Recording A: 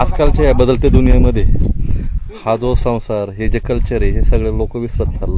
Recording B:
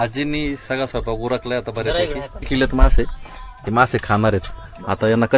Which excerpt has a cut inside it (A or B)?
B